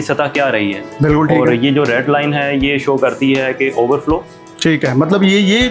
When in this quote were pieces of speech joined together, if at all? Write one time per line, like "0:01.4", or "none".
none